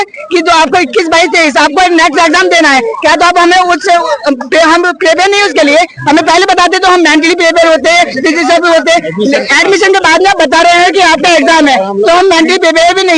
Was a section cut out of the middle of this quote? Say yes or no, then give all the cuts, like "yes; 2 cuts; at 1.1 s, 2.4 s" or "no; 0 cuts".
no; 0 cuts